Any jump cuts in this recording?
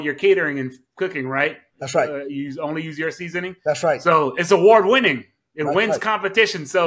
no; 0 cuts

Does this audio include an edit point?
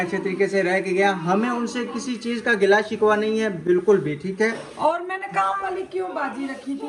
no; 0 cuts

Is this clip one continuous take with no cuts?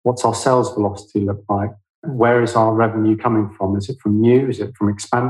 no; 1 cut; at 2.0 s

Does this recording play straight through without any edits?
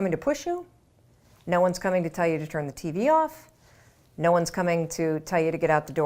yes; 0 cuts

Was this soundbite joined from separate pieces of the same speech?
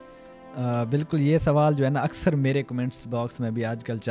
no; 0 cuts

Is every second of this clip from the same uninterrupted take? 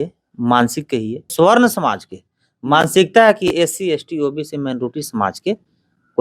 no; 1 cut; at 1.3 s

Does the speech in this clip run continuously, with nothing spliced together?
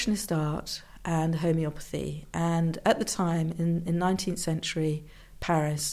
yes; 0 cuts

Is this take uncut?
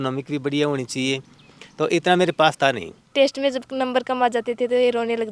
no; 1 cut; at 3.0 s

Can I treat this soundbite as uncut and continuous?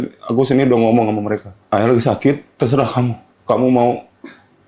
no; 2 cuts; at 1.5 s, 3.4 s

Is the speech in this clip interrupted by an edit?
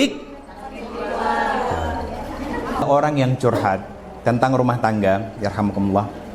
yes; 1 cut; at 2.8 s

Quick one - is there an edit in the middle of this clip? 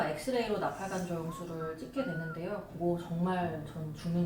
no; 0 cuts

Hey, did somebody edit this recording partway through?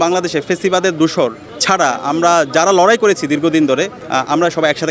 no; 0 cuts

